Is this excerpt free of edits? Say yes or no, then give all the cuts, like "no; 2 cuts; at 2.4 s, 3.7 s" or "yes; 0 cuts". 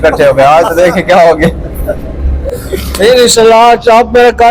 yes; 0 cuts